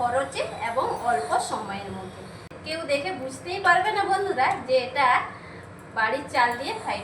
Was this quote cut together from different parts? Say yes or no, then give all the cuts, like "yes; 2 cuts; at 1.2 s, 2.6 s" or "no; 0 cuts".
yes; 1 cut; at 2.5 s